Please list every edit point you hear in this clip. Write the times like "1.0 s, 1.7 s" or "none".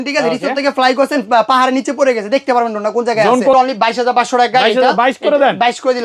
3.5 s